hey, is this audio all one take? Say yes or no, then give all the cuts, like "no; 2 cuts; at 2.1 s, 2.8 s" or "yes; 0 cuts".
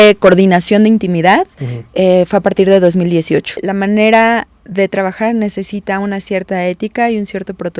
no; 1 cut; at 3.7 s